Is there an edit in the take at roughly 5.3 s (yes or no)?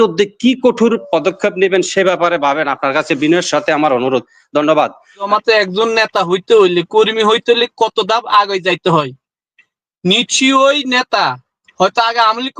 yes